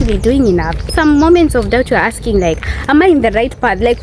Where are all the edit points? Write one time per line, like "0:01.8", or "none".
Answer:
0:00.9